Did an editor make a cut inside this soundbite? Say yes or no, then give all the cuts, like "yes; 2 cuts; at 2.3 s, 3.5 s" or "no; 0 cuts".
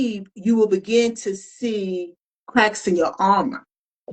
yes; 1 cut; at 2.3 s